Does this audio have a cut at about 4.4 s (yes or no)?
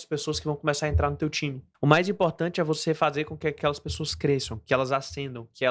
no